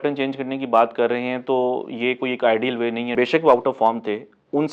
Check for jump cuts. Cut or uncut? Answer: cut